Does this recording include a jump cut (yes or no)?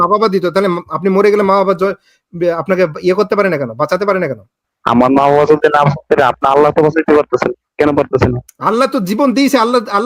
yes